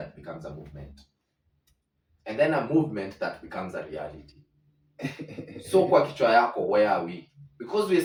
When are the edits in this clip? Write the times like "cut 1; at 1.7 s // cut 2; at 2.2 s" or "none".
none